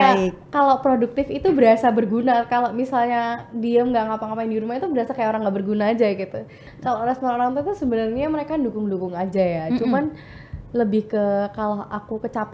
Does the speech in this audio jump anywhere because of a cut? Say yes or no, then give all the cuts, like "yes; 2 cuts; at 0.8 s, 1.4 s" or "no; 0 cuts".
yes; 1 cut; at 6.6 s